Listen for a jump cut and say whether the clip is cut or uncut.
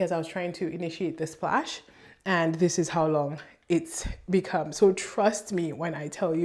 uncut